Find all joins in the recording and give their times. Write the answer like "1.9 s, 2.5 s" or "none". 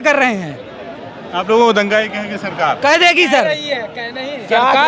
none